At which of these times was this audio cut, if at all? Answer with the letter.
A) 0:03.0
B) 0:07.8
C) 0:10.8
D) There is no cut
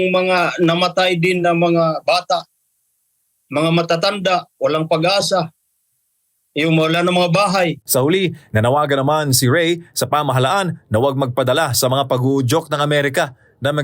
B